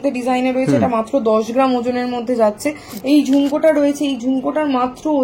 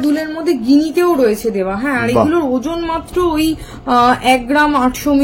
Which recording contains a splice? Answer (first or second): first